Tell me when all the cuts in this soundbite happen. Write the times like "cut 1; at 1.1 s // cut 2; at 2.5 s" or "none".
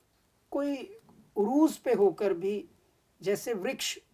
none